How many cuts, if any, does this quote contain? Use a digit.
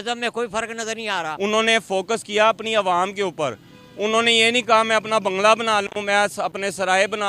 1